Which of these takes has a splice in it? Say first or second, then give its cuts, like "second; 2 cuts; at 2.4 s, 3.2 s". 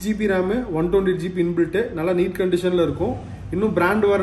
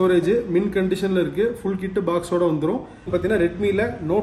second; 1 cut; at 3.1 s